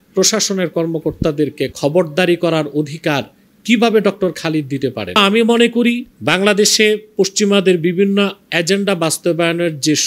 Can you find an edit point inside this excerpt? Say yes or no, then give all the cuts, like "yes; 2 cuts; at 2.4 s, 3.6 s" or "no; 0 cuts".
yes; 2 cuts; at 5.2 s, 6.1 s